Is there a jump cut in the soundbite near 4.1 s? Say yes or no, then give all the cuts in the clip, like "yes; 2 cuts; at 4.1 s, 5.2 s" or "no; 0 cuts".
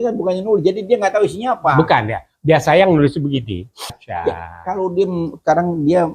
yes; 1 cut; at 4.1 s